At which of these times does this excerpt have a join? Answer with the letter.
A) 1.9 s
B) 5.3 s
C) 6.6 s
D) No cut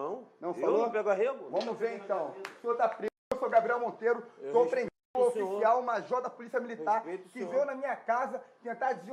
A